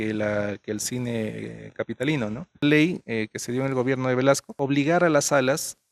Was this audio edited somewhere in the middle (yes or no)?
yes